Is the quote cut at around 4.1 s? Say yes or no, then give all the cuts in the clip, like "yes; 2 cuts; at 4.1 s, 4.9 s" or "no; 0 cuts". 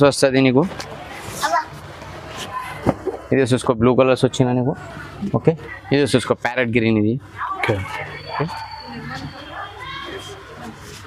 no; 1 cut; at 5.7 s